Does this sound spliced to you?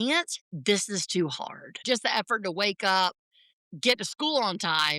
yes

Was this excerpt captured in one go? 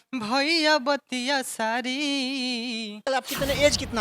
no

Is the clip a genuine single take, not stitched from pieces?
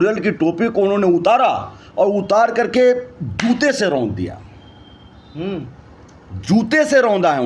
yes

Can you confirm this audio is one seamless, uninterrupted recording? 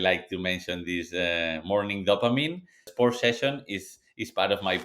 no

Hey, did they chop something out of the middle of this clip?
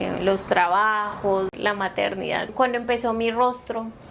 yes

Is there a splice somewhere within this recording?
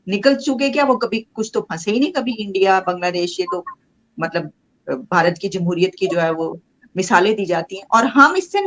no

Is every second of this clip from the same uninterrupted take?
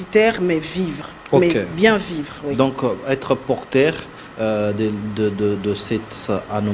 yes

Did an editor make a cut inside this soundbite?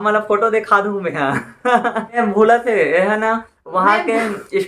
yes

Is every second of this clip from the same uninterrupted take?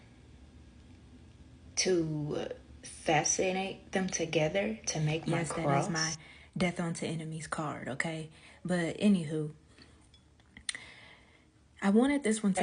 no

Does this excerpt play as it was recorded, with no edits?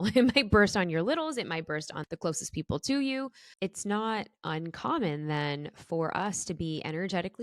no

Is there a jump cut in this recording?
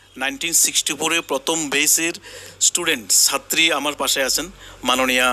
no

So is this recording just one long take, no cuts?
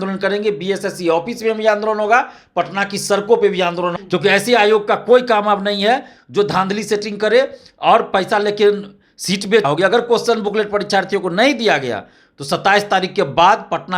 no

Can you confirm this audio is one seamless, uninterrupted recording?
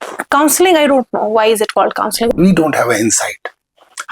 no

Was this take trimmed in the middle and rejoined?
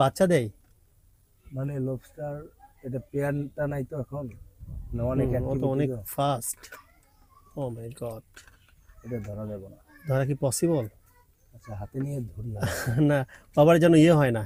no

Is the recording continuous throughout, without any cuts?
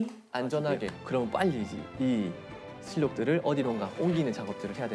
no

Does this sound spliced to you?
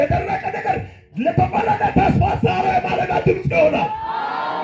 no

